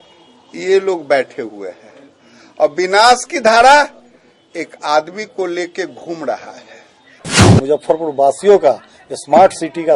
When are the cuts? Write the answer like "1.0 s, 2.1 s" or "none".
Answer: 7.5 s